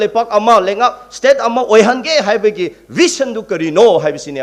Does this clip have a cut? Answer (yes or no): no